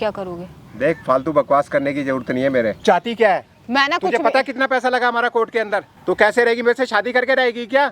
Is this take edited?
yes; 2 cuts; at 2.8 s, 5.9 s

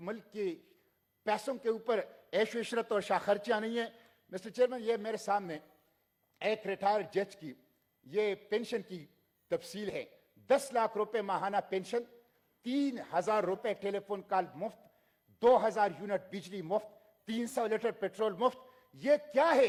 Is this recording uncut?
yes; 0 cuts

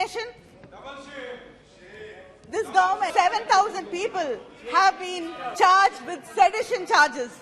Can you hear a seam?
yes; 1 cut; at 3.1 s

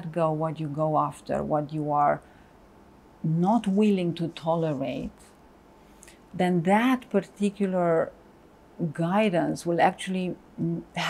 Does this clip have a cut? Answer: no; 0 cuts

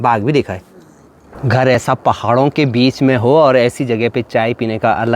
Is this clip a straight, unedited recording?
no; 1 cut; at 1.4 s

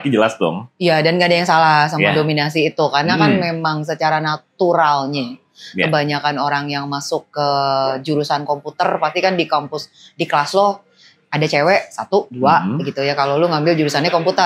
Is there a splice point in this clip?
no; 0 cuts

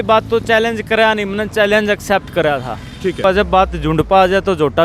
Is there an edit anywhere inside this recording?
yes; 1 cut; at 3.2 s

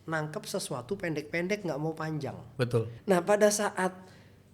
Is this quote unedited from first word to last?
no; 1 cut; at 2.9 s

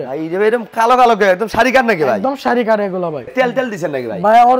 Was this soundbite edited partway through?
yes; 1 cut; at 3.3 s

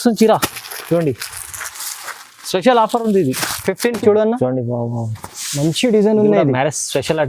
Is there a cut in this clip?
yes; 1 cut; at 3.9 s

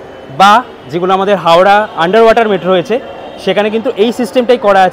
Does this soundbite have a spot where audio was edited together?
no; 0 cuts

